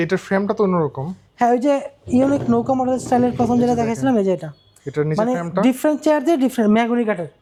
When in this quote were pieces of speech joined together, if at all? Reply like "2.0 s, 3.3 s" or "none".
none